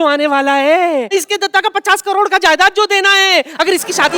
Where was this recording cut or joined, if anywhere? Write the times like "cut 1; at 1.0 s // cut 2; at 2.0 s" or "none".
none